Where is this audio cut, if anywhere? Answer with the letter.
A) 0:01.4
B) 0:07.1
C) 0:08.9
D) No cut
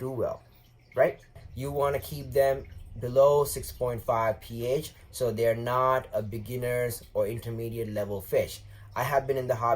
A